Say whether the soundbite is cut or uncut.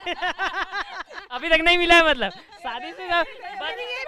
uncut